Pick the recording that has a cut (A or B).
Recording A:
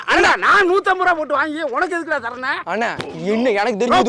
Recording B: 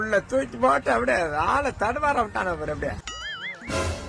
B